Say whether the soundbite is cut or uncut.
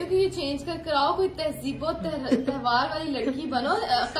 uncut